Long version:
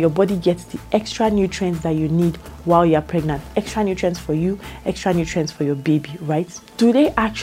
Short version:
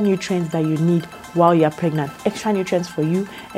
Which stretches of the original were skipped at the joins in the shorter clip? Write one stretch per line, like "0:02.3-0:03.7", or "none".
none